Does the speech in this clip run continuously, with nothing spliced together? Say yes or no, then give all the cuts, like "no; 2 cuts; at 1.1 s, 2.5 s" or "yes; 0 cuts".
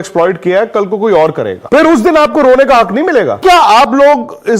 no; 2 cuts; at 1.5 s, 3.4 s